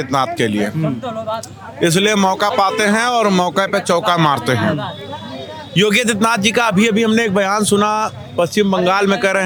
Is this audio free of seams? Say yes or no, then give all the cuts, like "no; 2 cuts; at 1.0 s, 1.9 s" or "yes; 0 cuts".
yes; 0 cuts